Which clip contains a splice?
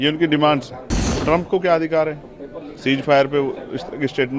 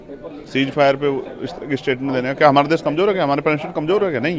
first; 1 cut; at 1.1 s

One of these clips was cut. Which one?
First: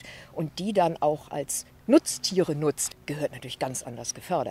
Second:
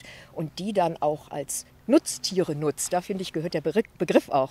first; 1 cut; at 2.8 s

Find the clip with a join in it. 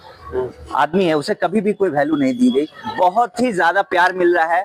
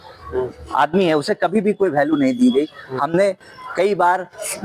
first; 1 cut; at 2.8 s

